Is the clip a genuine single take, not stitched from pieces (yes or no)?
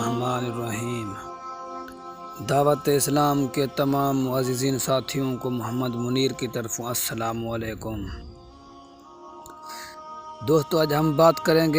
no